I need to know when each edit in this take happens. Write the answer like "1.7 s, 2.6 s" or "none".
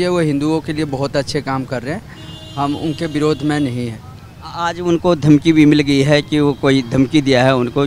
none